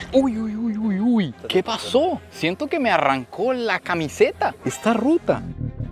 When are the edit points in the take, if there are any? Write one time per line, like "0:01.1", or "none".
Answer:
0:01.4